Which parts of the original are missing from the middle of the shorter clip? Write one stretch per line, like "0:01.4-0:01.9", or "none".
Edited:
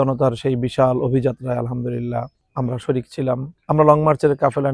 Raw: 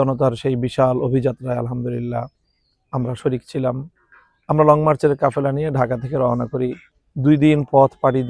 0:02.4-0:02.8
0:03.9-0:04.3